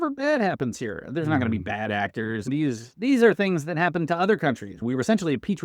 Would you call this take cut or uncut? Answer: cut